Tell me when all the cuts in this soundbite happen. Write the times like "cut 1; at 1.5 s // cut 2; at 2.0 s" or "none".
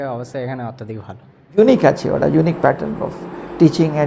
cut 1; at 1.6 s